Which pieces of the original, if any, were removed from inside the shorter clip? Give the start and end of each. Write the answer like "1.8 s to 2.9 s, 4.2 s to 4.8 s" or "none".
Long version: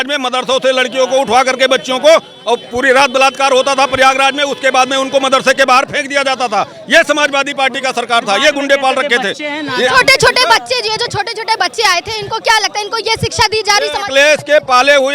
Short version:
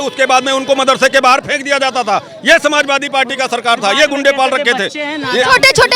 none